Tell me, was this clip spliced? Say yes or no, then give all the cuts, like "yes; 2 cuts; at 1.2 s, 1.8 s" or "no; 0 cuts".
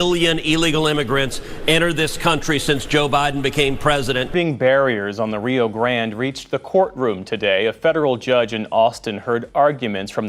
yes; 1 cut; at 4.3 s